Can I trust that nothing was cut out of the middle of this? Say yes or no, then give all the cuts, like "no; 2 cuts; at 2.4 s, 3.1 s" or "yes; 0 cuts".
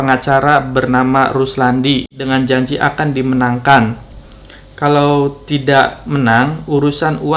no; 1 cut; at 2.1 s